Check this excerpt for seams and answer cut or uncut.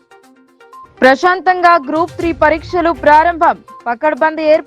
uncut